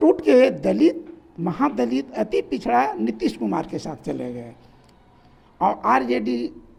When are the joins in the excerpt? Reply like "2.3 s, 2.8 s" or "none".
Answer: none